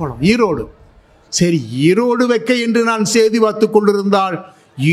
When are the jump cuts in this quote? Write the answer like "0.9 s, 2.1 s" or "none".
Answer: none